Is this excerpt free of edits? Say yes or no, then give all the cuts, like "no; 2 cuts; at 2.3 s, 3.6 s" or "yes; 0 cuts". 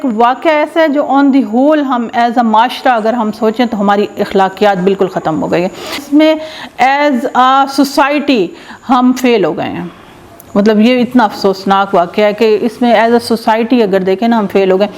yes; 0 cuts